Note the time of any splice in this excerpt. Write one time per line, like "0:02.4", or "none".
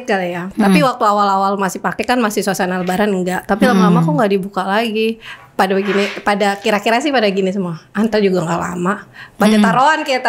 none